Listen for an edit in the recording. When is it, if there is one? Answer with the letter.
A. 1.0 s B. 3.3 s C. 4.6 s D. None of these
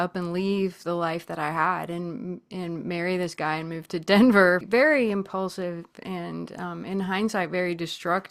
C